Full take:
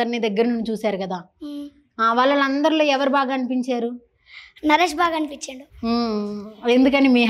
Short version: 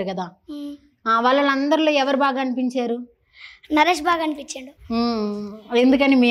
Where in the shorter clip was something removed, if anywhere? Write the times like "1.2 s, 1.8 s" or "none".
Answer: none